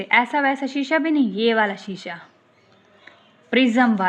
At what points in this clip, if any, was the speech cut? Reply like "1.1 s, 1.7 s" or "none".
none